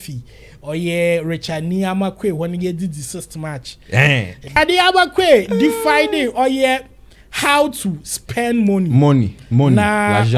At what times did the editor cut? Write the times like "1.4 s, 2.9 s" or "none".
4.6 s